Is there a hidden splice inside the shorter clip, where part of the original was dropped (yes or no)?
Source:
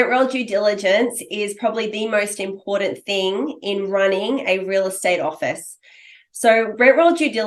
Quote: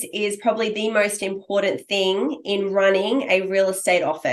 no